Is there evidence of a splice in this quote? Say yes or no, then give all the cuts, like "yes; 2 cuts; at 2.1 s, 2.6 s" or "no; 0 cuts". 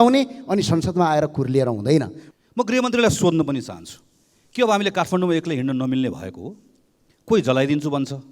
yes; 1 cut; at 2.2 s